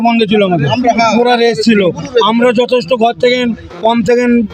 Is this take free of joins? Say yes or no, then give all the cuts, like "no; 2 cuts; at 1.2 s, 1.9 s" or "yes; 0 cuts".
yes; 0 cuts